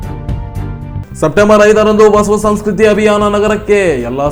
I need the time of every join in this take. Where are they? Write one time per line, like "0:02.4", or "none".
none

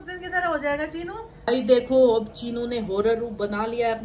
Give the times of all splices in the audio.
0:01.4

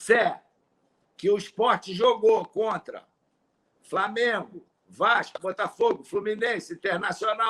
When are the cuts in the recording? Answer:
none

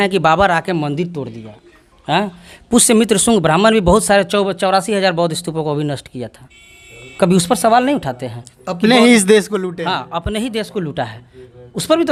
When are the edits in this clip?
none

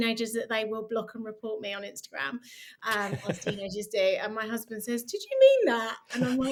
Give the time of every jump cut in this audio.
none

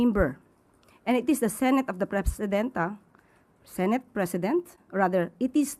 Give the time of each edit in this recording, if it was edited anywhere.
none

